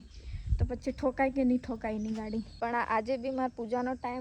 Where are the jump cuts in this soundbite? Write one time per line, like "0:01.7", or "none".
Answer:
0:02.5